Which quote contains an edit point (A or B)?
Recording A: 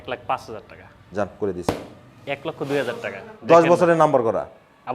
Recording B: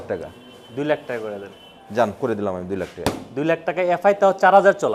A